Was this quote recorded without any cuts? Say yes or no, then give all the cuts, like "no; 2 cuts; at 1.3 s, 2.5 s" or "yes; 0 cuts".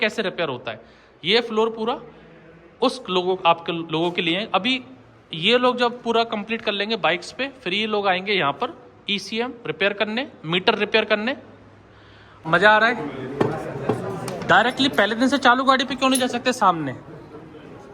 no; 1 cut; at 12.3 s